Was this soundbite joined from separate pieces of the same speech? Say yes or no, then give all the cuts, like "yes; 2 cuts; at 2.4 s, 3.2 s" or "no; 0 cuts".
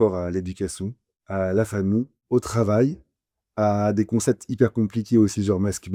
no; 0 cuts